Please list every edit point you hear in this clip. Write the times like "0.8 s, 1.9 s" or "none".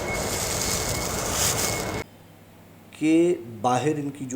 2.0 s